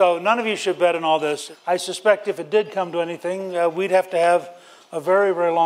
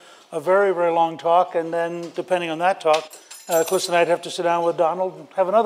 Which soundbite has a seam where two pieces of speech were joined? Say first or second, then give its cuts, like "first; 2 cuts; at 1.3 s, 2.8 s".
first; 1 cut; at 1.5 s